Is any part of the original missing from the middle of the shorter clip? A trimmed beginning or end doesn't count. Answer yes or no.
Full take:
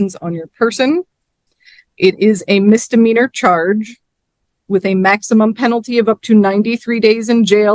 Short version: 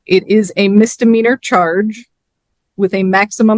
no